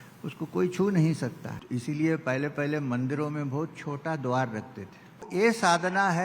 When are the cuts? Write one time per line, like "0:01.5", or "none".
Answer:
0:01.5
0:05.3